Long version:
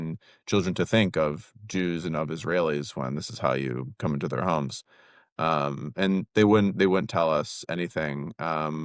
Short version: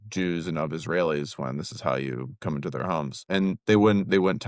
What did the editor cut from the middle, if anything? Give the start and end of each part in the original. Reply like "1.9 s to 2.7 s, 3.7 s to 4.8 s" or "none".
4.7 s to 5.9 s